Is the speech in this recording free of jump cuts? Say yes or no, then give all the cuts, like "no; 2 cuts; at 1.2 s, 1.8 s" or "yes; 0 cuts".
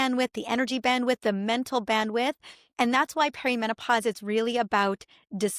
yes; 0 cuts